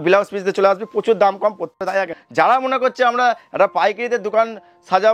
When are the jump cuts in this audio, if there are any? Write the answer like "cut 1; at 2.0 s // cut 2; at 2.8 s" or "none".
cut 1; at 1.9 s

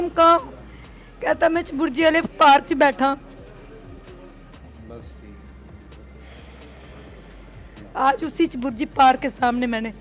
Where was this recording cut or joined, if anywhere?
none

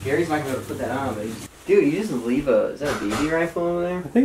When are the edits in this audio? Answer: cut 1; at 1.4 s

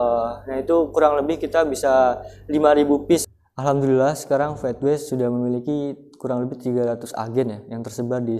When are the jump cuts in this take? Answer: cut 1; at 3.2 s

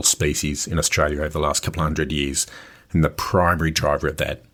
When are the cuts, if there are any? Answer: none

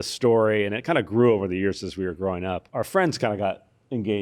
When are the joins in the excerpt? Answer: cut 1; at 2.6 s

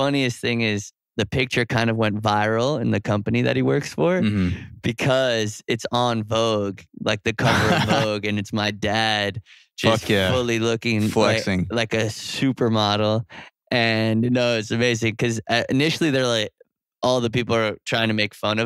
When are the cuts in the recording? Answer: cut 1; at 1.0 s

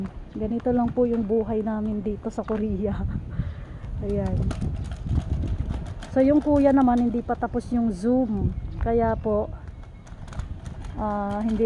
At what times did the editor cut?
none

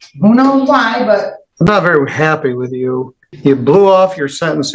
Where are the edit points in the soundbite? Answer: cut 1; at 1.4 s // cut 2; at 3.2 s

